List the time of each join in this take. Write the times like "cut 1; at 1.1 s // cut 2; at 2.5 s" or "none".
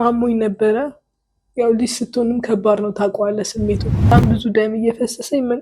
cut 1; at 4.1 s